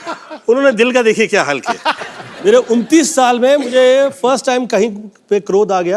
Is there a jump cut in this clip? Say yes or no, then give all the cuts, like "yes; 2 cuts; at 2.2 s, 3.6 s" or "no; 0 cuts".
yes; 1 cut; at 2.0 s